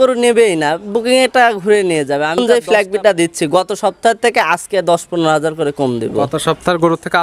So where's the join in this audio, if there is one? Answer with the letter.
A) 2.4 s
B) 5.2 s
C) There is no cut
A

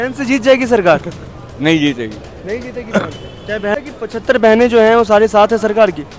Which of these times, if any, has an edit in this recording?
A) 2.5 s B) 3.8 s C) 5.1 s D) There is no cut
B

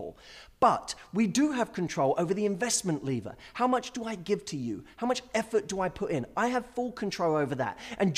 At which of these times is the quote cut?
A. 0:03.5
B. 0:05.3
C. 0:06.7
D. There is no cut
D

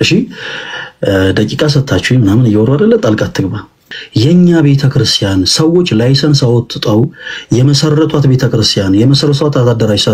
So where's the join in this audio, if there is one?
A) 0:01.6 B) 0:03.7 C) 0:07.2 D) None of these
B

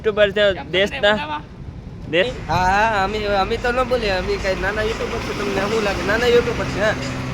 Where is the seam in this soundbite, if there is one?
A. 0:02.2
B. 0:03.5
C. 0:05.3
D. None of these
A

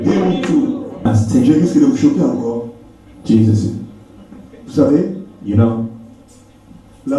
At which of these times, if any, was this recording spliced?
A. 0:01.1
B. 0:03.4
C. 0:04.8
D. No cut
A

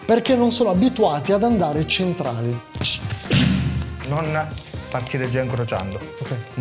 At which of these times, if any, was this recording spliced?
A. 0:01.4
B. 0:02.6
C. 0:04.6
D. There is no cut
B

